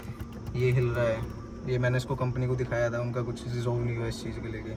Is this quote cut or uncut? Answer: uncut